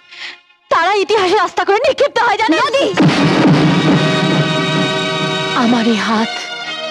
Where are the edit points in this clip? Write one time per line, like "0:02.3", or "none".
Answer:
none